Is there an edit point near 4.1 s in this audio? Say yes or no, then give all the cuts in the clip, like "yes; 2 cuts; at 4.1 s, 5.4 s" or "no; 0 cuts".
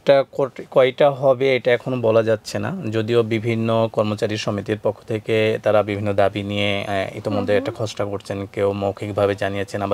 no; 0 cuts